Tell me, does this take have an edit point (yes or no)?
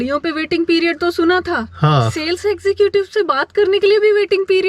no